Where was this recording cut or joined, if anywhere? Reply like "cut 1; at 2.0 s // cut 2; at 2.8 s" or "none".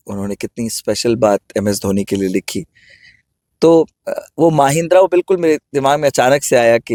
none